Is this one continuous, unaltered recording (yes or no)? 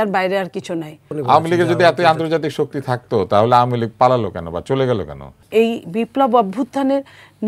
no